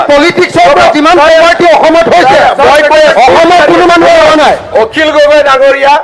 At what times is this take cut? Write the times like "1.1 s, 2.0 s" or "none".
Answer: 4.6 s